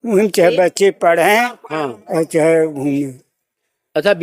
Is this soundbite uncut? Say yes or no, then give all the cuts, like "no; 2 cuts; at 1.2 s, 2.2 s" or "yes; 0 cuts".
yes; 0 cuts